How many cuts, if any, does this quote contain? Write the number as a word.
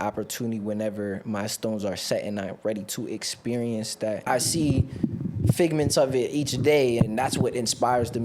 two